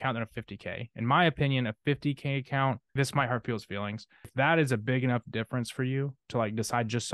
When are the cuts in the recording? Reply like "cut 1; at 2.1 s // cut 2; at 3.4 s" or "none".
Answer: cut 1; at 2.9 s // cut 2; at 4.3 s